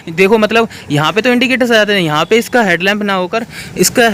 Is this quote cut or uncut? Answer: uncut